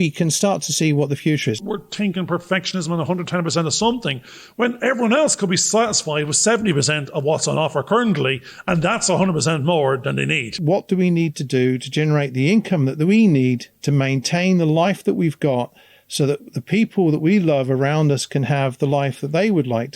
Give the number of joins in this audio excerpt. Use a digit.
2